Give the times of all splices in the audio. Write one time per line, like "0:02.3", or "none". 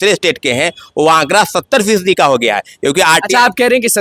none